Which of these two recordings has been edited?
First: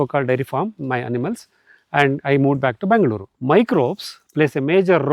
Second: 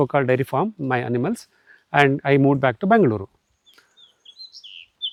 first; 1 cut; at 3.3 s

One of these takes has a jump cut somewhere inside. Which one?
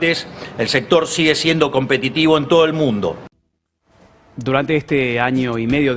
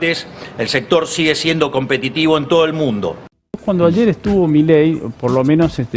second; 1 cut; at 3.6 s

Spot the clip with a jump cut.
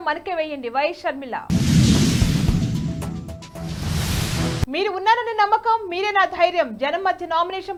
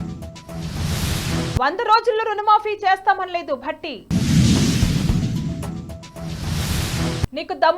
second; 1 cut; at 1.3 s

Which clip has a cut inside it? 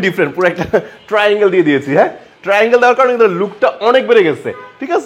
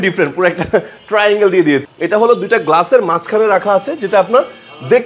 second; 1 cut; at 1.9 s

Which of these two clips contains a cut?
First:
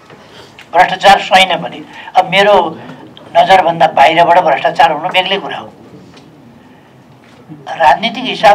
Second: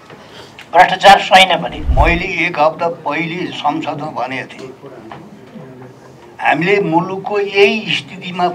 second; 1 cut; at 1.8 s

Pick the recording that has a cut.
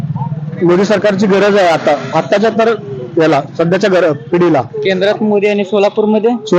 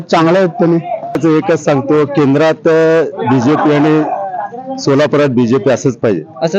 second; 1 cut; at 1.2 s

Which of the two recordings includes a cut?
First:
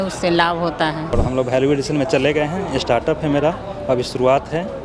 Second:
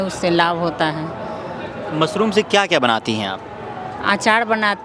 first; 1 cut; at 1.1 s

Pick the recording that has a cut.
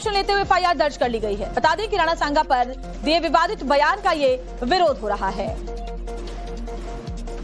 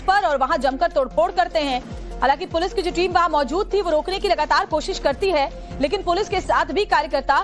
second; 1 cut; at 1.7 s

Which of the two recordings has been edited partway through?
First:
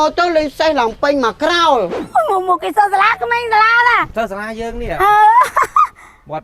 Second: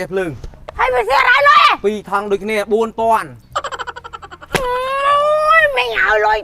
first; 1 cut; at 2.0 s

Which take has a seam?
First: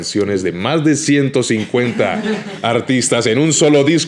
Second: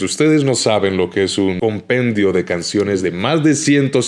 second; 1 cut; at 1.6 s

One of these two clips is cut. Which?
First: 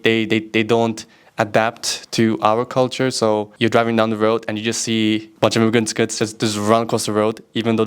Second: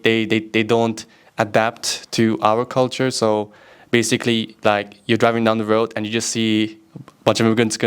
first; 2 cuts; at 3.5 s, 5.3 s

